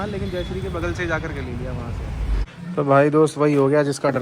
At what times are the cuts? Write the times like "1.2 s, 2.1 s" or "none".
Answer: 2.4 s